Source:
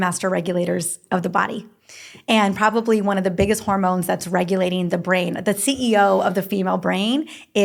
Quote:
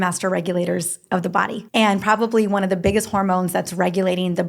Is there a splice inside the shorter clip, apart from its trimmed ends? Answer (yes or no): yes